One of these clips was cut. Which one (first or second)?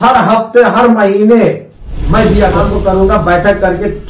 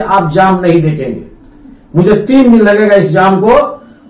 first